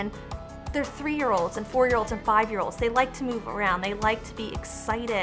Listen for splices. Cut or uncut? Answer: uncut